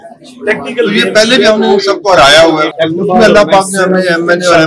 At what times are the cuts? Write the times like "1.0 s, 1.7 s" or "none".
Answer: 2.7 s